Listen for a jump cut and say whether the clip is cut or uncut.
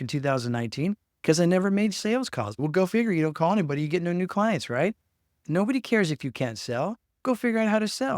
cut